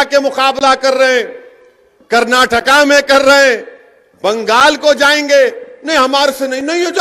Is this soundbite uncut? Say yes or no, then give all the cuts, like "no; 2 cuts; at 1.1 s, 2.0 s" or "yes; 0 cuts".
yes; 0 cuts